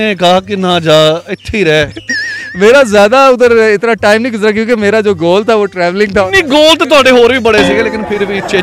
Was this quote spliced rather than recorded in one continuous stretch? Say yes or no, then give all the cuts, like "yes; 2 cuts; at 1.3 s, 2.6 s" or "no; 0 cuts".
no; 0 cuts